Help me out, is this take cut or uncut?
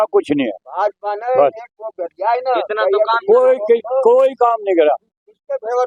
uncut